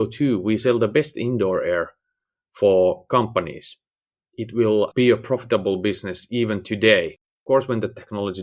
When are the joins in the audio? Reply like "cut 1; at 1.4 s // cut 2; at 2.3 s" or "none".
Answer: cut 1; at 4.9 s

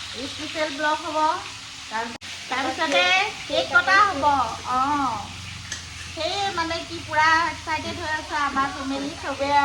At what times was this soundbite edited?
cut 1; at 2.2 s

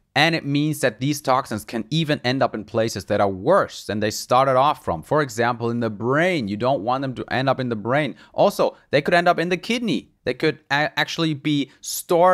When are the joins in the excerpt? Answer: none

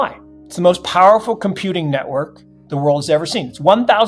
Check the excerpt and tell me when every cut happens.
none

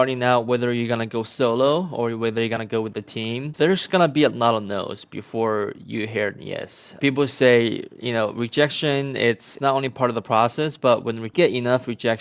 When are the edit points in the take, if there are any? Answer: cut 1; at 3.5 s // cut 2; at 7.0 s // cut 3; at 9.5 s // cut 4; at 11.3 s

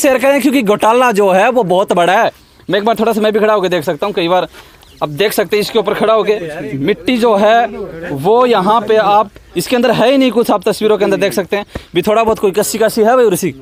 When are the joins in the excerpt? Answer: none

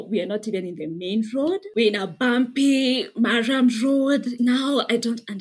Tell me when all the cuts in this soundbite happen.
cut 1; at 1.6 s // cut 2; at 4.3 s

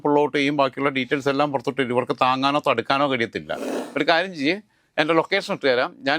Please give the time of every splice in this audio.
cut 1; at 3.7 s

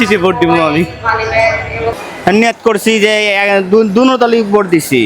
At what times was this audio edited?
cut 1; at 2.0 s

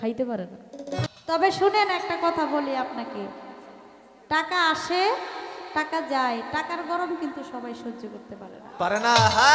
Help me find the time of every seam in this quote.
cut 1; at 1.0 s

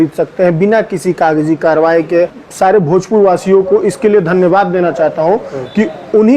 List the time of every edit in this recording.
cut 1; at 2.4 s

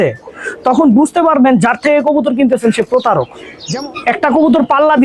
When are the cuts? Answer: cut 1; at 3.4 s

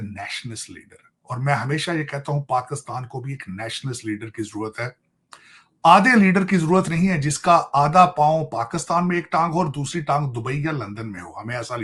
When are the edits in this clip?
none

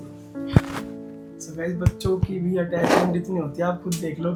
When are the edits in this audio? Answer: none

